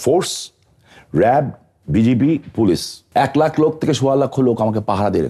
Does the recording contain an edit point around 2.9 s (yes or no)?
yes